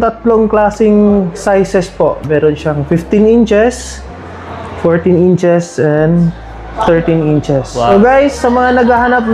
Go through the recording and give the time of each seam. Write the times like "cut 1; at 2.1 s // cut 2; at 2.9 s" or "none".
cut 1; at 8.0 s